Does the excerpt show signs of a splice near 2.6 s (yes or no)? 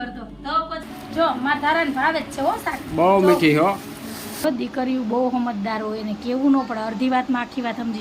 no